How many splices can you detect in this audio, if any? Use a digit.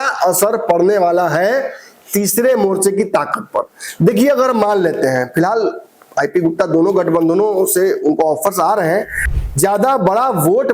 1